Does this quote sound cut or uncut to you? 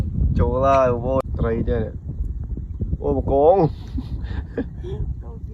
cut